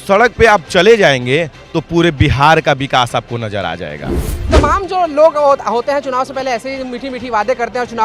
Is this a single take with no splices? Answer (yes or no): no